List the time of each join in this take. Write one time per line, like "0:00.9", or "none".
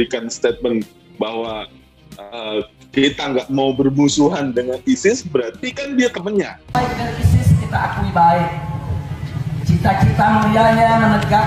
0:06.8